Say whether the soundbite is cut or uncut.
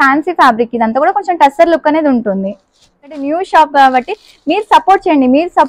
cut